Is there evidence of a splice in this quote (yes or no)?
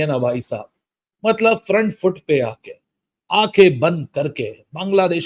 no